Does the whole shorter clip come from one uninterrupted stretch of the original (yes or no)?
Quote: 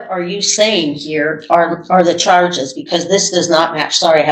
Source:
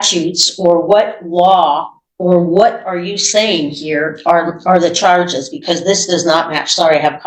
yes